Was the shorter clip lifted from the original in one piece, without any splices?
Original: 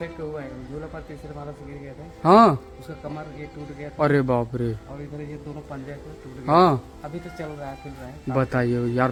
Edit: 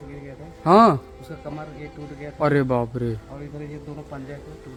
yes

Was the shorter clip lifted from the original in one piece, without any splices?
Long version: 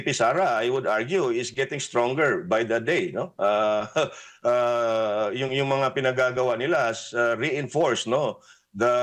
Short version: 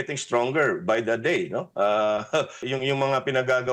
no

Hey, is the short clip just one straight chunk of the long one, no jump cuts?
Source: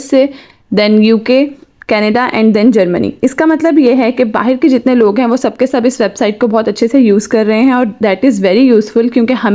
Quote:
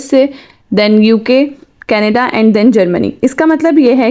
yes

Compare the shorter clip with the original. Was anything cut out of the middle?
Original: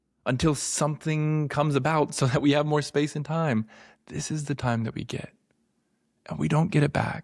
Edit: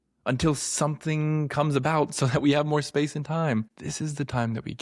yes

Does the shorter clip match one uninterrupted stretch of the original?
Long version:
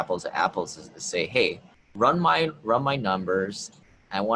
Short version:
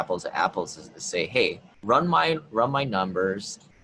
no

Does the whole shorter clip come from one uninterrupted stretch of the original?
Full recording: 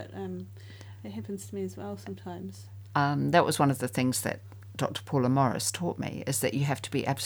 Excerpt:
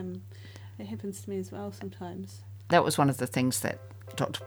no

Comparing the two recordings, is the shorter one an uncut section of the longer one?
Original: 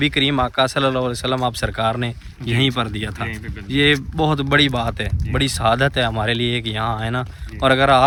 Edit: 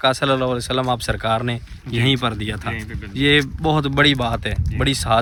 yes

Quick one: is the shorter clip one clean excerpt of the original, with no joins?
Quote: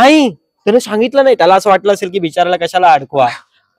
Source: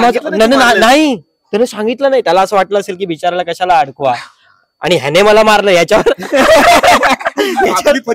yes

